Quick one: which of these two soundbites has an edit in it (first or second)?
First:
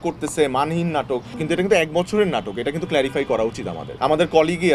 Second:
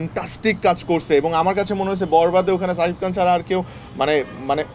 first